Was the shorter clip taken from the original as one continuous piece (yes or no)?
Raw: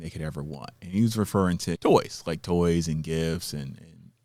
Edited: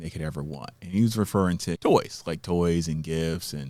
yes